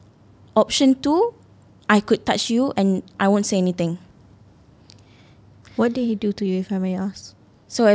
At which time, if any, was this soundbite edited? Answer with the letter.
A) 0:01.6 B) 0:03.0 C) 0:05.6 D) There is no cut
C